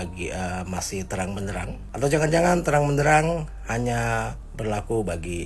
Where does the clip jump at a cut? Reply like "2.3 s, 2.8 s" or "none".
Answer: 1.8 s, 4.4 s